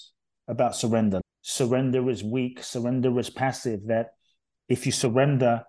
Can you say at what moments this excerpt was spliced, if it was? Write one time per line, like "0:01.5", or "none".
0:01.2